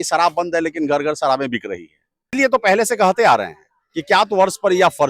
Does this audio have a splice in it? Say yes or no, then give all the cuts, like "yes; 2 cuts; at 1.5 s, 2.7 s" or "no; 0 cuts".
yes; 1 cut; at 2.2 s